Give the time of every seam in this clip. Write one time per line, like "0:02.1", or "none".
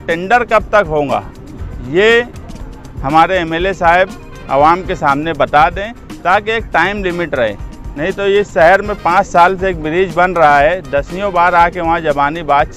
none